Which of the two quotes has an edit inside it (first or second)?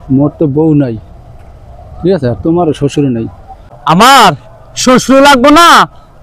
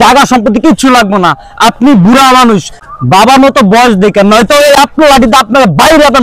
first